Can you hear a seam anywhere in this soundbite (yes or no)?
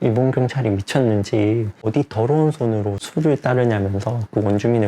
yes